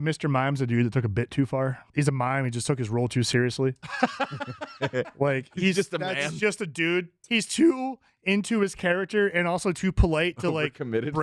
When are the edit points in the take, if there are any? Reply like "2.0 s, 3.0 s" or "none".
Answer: 1.8 s, 7.2 s